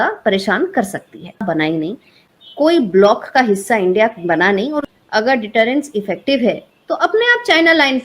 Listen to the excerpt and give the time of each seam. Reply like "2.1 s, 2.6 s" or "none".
1.4 s, 4.9 s